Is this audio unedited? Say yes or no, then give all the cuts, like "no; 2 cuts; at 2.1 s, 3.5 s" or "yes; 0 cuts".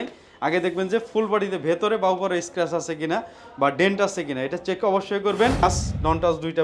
no; 1 cut; at 5.6 s